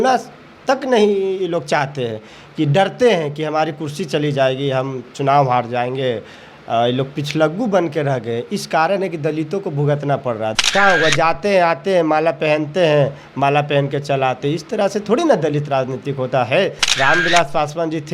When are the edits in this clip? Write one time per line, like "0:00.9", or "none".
0:10.6